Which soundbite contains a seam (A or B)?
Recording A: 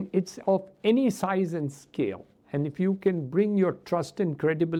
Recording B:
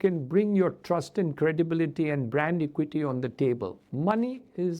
B